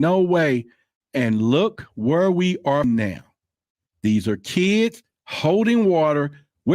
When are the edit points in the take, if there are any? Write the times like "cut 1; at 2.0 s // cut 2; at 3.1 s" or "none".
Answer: cut 1; at 2.8 s